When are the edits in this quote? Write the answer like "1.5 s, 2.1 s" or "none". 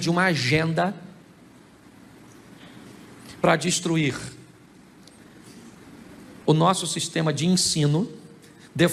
none